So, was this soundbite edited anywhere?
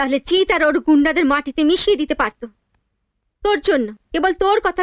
no; 0 cuts

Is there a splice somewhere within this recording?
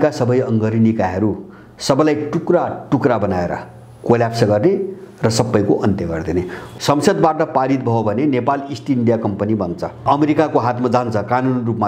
yes; 2 cuts; at 6.6 s, 10.0 s

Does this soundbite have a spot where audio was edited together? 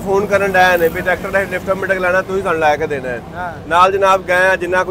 no; 0 cuts

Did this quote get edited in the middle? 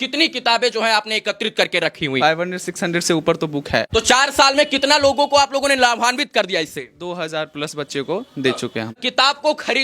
yes; 3 cuts; at 2.2 s, 3.9 s, 9.0 s

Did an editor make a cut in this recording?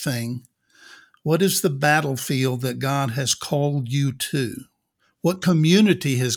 no; 0 cuts

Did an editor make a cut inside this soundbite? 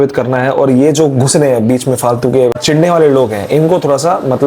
yes; 1 cut; at 2.6 s

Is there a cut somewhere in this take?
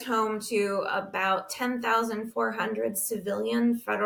no; 0 cuts

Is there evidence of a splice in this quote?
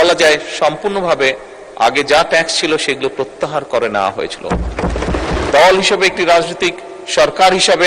yes; 1 cut; at 5.5 s

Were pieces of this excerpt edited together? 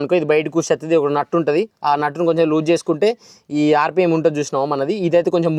no; 0 cuts

